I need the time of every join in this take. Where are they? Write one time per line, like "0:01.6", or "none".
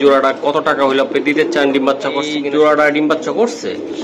0:02.4